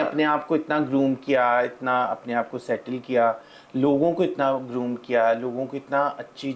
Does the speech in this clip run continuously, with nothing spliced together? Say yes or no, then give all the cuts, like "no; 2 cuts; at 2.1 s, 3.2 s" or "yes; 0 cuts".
yes; 0 cuts